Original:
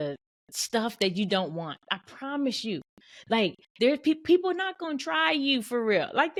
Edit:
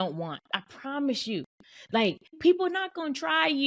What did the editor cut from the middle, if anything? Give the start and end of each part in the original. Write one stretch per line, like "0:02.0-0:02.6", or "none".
0:03.7-0:04.2